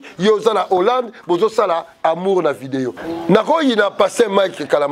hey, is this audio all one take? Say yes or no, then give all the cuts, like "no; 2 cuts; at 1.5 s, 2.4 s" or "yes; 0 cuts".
no; 1 cut; at 3.0 s